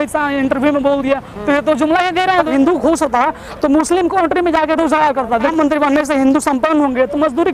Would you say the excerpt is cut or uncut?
cut